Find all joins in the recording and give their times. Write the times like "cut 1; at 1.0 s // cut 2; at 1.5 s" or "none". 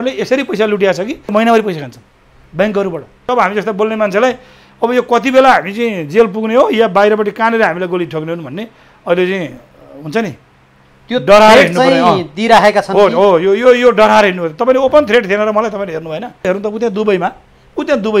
cut 1; at 1.3 s // cut 2; at 3.3 s // cut 3; at 16.5 s